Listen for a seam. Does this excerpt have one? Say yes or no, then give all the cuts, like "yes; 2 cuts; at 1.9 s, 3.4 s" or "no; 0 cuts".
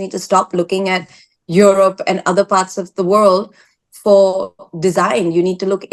no; 0 cuts